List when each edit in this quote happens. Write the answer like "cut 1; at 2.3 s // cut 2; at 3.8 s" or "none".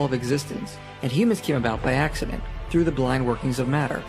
cut 1; at 1.7 s